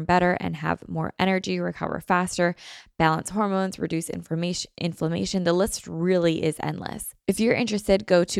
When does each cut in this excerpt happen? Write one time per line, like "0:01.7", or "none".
0:07.1

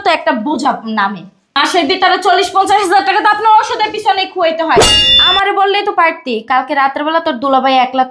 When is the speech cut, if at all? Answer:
0:04.9

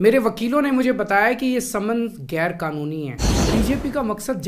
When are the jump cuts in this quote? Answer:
0:03.3

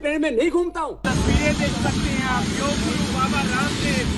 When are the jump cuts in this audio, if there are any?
0:01.0

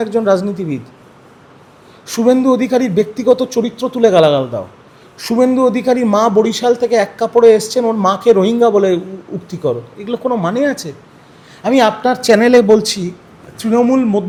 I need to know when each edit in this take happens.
none

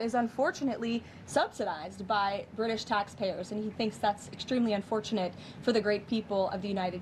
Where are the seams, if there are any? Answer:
none

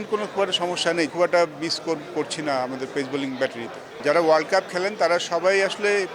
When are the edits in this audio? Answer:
0:01.1
0:04.0

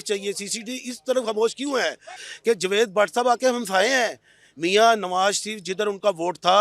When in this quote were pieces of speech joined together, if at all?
0:02.2

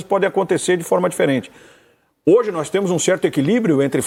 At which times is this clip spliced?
none

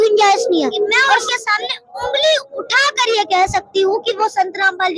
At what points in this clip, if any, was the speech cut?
0:01.2

